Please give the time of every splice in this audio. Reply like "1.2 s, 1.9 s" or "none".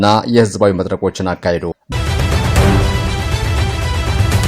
1.9 s